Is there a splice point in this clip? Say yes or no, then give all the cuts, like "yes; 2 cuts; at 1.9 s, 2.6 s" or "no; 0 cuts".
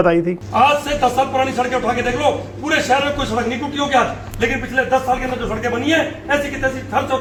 no; 0 cuts